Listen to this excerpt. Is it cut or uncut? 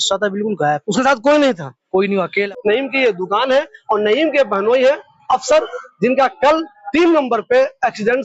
cut